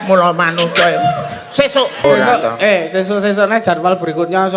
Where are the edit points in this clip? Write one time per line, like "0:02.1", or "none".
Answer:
0:02.0